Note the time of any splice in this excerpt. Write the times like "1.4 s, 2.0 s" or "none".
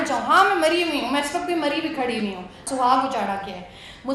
2.6 s